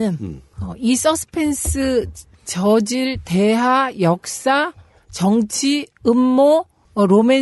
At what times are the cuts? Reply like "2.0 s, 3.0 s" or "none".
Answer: 3.2 s